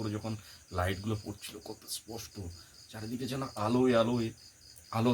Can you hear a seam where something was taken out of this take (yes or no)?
no